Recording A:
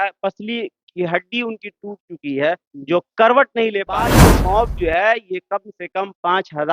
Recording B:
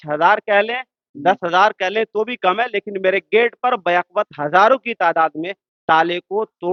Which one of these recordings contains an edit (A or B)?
A